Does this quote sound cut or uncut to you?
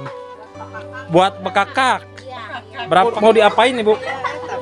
cut